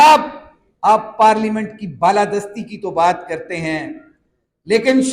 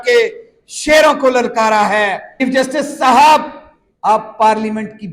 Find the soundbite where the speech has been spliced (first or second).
second